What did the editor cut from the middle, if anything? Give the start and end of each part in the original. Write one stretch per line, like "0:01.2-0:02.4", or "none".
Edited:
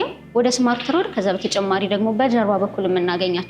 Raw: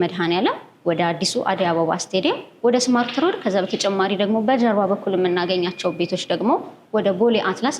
none